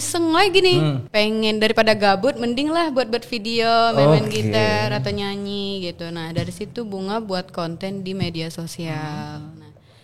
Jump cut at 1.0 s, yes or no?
yes